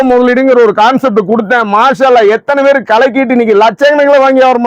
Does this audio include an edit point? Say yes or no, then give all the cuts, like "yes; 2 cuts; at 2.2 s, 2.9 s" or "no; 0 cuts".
no; 0 cuts